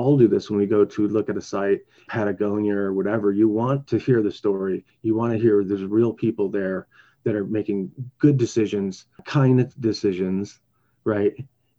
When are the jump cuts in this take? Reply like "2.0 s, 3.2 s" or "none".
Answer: 2.0 s, 3.8 s